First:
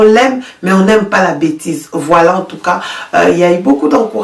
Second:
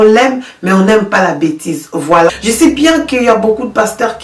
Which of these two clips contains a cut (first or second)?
second